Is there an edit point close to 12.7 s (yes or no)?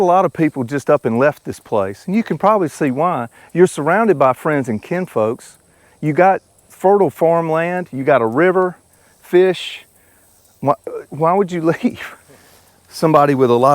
yes